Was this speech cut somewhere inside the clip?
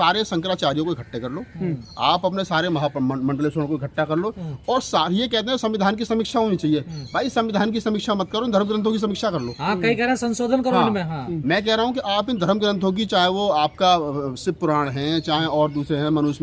no; 0 cuts

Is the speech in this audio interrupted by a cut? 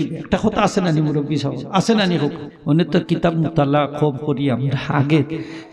yes; 1 cut; at 2.5 s

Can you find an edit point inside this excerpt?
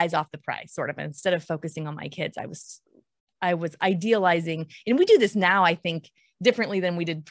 no; 0 cuts

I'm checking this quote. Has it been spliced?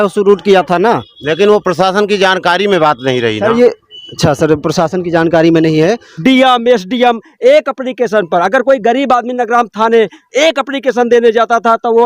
yes; 2 cuts; at 6.2 s, 7.8 s

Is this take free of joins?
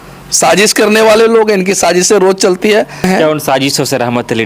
no; 1 cut; at 3.0 s

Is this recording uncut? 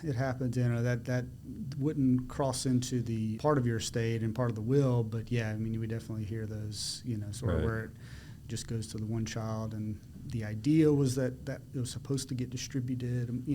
no; 1 cut; at 3.4 s

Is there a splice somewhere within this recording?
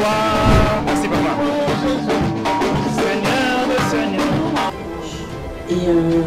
yes; 1 cut; at 4.7 s

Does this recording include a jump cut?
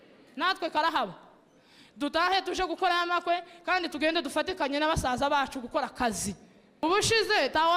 yes; 1 cut; at 6.8 s

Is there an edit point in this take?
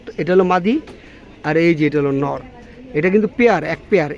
no; 0 cuts

